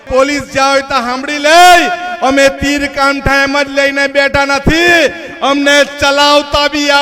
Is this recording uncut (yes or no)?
yes